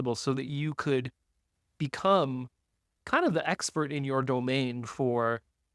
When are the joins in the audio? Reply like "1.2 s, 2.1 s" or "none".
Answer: none